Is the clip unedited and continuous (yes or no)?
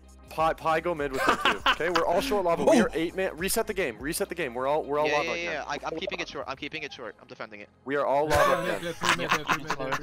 yes